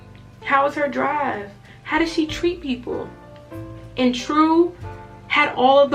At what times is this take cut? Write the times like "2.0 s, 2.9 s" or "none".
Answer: none